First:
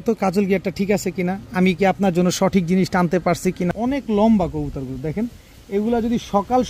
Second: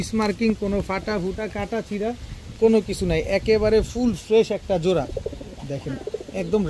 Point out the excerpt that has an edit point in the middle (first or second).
first